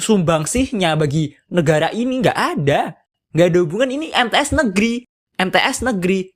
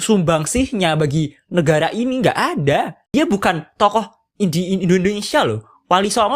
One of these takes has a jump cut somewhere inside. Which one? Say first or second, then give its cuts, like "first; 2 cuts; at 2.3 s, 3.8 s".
second; 1 cut; at 3.0 s